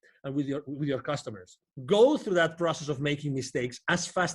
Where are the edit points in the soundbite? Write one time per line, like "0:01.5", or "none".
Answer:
0:01.7

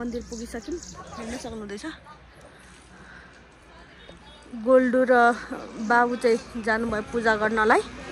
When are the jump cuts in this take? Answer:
none

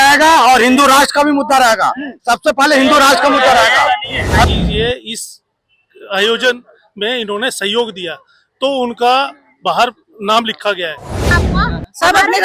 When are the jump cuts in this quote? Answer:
0:04.4
0:11.3

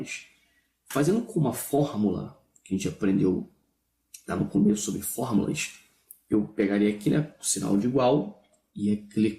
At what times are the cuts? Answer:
0:02.3

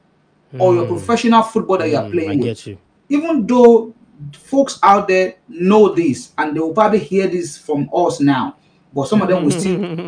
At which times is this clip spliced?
0:03.0

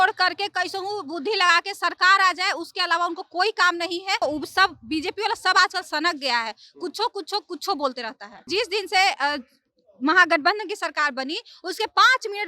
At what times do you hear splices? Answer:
0:04.2
0:08.4

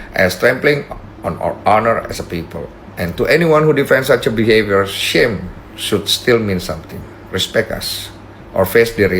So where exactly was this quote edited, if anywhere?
none

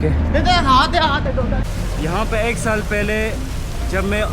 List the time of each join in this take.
0:01.6

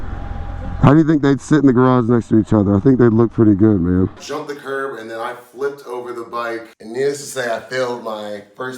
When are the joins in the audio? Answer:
0:04.2
0:06.8

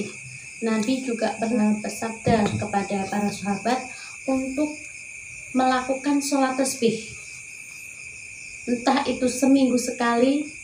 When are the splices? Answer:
0:01.6

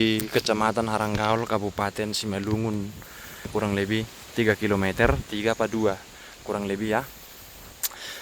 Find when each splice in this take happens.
0:03.5

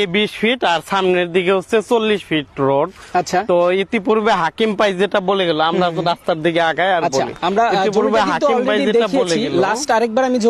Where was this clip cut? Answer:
none

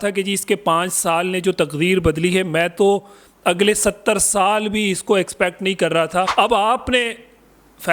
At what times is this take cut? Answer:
0:06.3

